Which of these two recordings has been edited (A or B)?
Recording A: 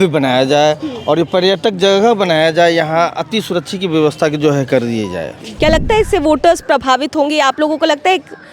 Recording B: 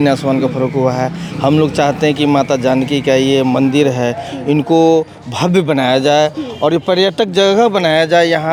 A